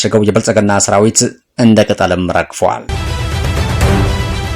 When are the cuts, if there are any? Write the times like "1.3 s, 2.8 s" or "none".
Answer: 2.9 s